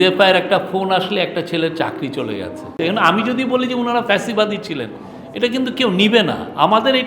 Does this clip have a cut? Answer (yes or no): yes